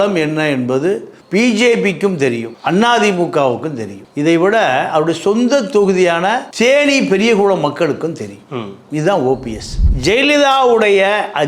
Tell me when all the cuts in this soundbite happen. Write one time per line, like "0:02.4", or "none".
0:09.9